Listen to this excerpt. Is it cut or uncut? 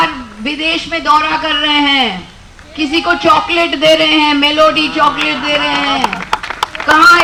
uncut